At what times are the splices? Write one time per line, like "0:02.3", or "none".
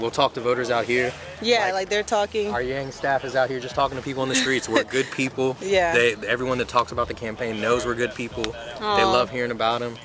none